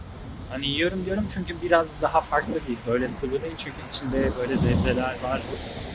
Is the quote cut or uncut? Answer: uncut